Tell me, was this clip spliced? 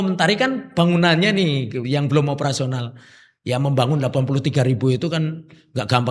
no; 0 cuts

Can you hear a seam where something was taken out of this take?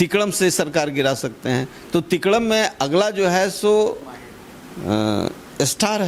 no; 0 cuts

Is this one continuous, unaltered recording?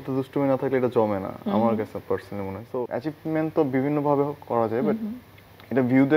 no; 1 cut; at 2.9 s

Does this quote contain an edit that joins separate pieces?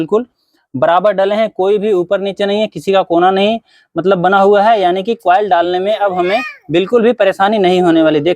no; 0 cuts

